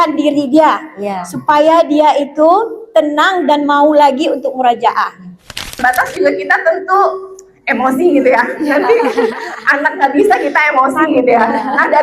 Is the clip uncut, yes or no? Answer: no